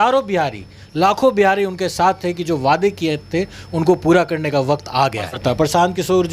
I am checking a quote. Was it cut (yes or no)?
yes